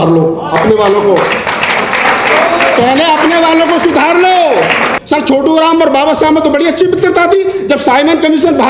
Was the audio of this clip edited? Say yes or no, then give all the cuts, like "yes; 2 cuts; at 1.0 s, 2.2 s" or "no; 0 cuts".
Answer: yes; 1 cut; at 4.9 s